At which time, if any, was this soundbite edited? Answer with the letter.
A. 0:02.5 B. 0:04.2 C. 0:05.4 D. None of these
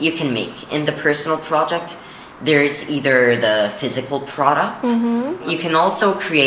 C